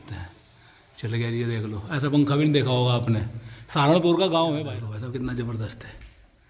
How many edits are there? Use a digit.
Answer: 1